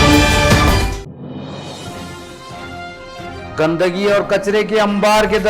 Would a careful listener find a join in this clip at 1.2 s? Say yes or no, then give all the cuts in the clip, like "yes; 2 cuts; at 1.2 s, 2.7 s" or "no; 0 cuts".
no; 1 cut; at 2.5 s